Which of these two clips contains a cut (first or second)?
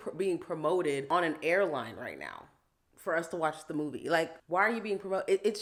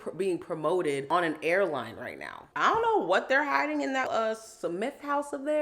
second